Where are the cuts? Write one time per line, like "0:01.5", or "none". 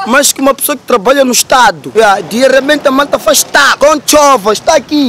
0:01.8
0:03.7